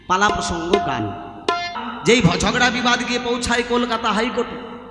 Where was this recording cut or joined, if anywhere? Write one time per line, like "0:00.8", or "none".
0:01.8